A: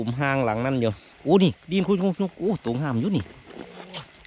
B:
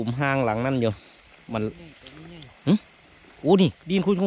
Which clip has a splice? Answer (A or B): A